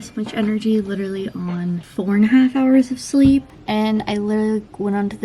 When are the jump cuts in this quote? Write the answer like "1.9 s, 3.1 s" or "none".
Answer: 1.9 s, 3.5 s